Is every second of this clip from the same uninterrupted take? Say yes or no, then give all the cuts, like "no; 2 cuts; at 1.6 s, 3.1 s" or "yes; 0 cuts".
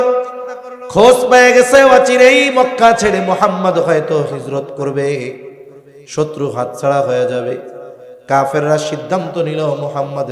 yes; 0 cuts